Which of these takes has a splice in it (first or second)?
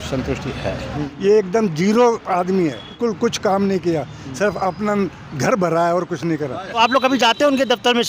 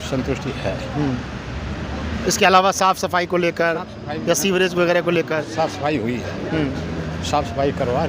first